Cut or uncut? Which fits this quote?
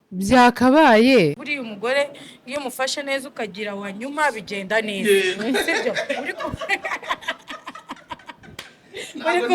cut